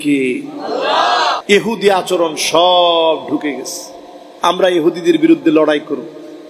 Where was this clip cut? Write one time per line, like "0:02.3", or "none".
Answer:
0:01.4